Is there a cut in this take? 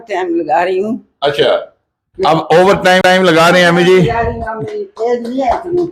no; 0 cuts

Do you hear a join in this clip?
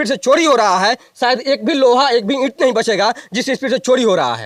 no; 0 cuts

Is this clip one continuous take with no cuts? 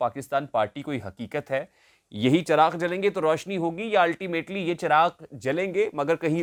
yes; 0 cuts

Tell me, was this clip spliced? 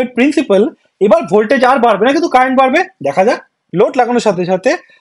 yes; 1 cut; at 3.6 s

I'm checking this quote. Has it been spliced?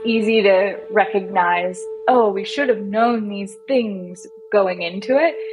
no; 0 cuts

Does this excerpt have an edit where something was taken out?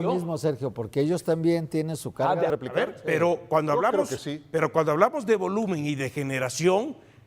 yes; 1 cut; at 2.5 s

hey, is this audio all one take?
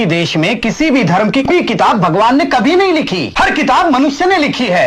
no; 2 cuts; at 1.5 s, 3.2 s

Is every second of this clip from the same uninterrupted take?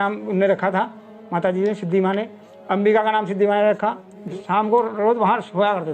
no; 1 cut; at 4.3 s

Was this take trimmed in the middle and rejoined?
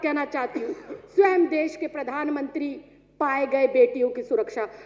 no; 0 cuts

